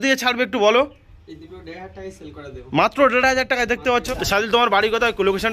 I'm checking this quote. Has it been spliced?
yes; 1 cut; at 4.1 s

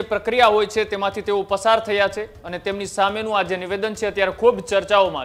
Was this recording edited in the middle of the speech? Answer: no; 0 cuts

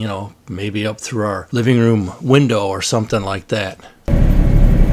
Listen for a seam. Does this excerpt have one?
no; 0 cuts

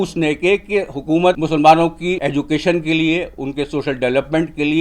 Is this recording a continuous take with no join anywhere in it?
no; 2 cuts; at 1.4 s, 2.2 s

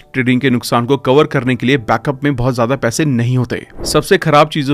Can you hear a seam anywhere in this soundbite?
yes; 1 cut; at 3.7 s

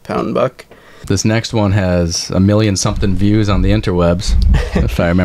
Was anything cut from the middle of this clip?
yes; 1 cut; at 0.9 s

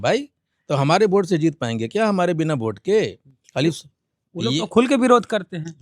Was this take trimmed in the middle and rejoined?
no; 0 cuts

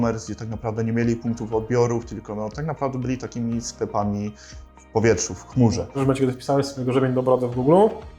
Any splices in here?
yes; 1 cut; at 6.0 s

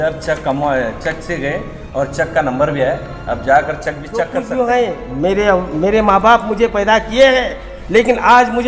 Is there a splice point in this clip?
yes; 1 cut; at 4.4 s

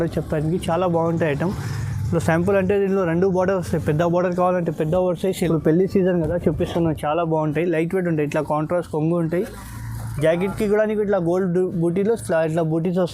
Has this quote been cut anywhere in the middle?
yes; 1 cut; at 5.5 s

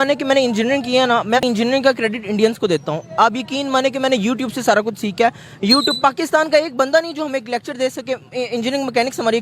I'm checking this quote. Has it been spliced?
yes; 1 cut; at 1.4 s

